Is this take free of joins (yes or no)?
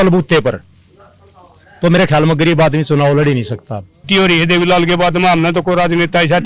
no